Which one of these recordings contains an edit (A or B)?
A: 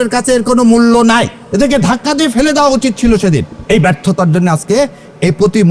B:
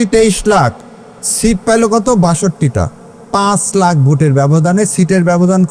A